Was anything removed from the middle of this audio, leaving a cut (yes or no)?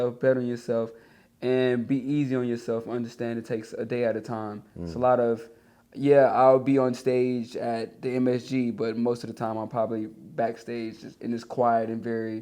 no